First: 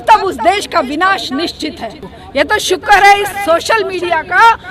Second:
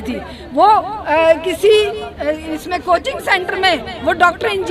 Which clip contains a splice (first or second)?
first